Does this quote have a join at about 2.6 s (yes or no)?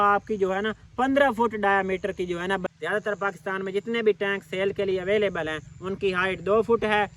yes